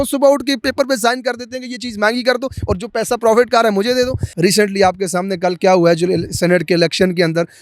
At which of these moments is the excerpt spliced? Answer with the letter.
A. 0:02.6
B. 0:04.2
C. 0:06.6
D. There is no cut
B